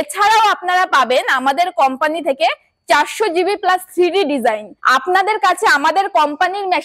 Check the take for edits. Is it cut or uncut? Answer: cut